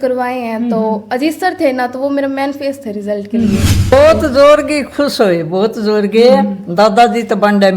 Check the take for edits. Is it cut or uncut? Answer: cut